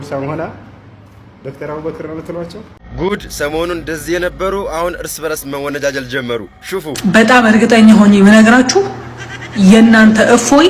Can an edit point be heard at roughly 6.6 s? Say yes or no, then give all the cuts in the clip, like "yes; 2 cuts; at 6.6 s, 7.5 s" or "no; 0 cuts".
no; 1 cut; at 2.8 s